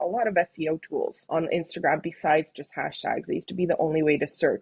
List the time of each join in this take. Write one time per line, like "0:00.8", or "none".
0:01.2